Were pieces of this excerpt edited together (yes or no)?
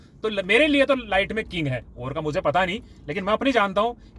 no